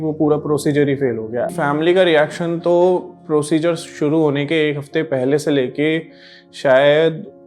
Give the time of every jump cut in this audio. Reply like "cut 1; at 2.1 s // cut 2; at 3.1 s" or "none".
cut 1; at 1.5 s